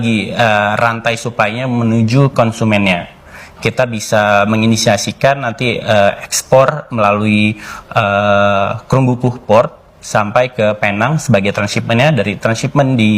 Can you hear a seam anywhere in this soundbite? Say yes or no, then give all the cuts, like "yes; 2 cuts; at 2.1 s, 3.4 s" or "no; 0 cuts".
no; 0 cuts